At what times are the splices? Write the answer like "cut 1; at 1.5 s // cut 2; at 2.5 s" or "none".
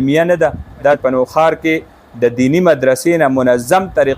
cut 1; at 1.0 s